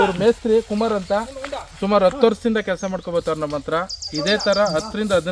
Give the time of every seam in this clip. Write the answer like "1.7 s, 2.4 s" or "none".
none